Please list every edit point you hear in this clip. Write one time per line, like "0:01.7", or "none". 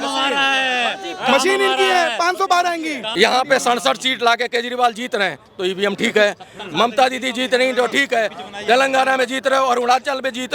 0:03.0